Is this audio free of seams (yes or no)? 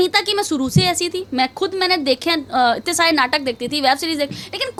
yes